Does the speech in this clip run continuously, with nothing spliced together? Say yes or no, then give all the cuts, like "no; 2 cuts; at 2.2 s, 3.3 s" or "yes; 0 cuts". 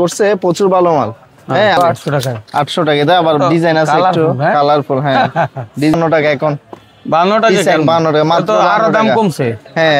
no; 2 cuts; at 1.8 s, 5.9 s